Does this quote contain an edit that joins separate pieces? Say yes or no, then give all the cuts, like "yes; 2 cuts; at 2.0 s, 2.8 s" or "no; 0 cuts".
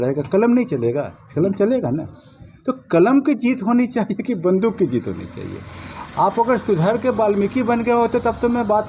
no; 0 cuts